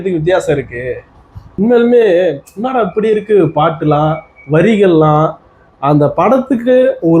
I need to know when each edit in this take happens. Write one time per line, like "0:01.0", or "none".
0:01.4